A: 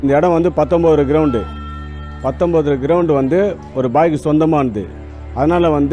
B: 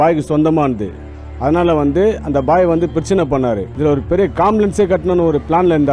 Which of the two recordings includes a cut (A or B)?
B